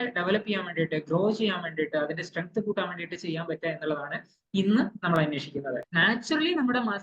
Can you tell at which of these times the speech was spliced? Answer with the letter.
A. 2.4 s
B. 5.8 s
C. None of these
B